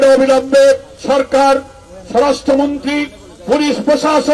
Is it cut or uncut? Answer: cut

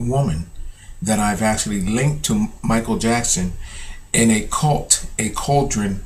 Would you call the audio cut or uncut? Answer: cut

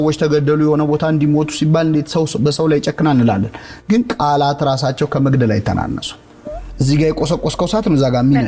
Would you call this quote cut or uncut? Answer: uncut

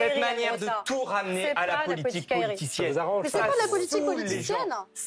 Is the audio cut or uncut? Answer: uncut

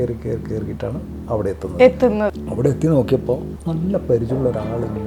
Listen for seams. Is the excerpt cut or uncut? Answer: cut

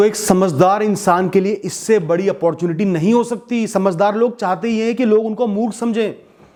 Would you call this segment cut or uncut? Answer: uncut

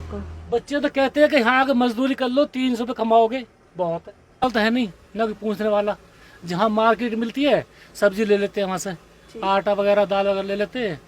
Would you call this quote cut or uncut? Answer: cut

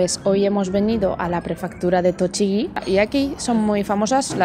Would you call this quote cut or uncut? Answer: cut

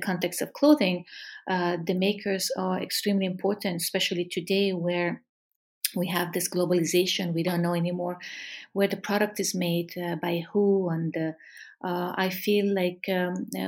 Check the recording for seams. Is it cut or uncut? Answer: uncut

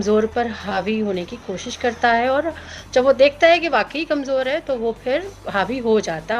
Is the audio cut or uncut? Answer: uncut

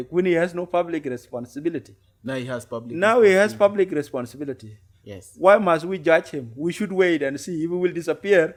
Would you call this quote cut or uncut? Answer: uncut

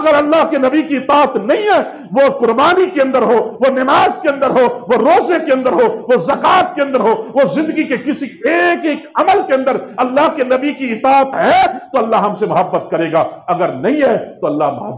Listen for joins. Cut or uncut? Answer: uncut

